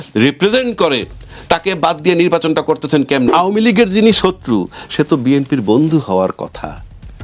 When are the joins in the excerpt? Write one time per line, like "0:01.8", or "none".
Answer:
0:03.3